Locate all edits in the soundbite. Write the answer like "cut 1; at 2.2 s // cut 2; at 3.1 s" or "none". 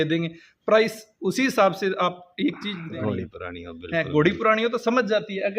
cut 1; at 2.8 s